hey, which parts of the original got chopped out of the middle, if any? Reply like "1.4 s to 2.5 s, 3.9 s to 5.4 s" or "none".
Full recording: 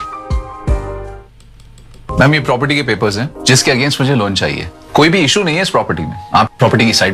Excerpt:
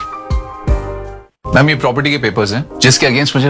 1.3 s to 1.9 s